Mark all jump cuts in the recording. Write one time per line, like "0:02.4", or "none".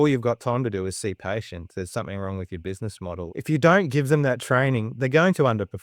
0:03.3
0:04.9